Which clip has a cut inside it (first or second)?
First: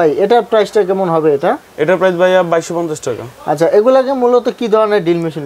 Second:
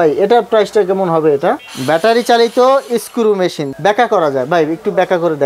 second